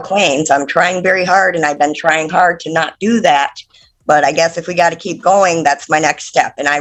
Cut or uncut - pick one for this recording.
uncut